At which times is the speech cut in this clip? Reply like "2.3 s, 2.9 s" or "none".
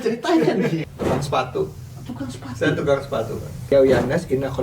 0.8 s, 3.5 s